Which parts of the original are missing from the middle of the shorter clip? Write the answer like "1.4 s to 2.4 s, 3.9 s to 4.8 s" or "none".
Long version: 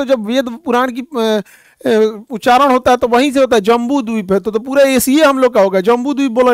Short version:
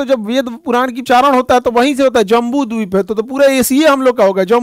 1.0 s to 2.3 s